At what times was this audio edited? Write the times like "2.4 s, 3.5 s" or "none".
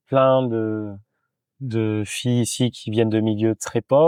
none